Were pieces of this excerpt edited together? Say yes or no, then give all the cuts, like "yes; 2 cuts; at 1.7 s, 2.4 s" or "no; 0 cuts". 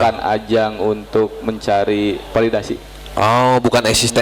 no; 0 cuts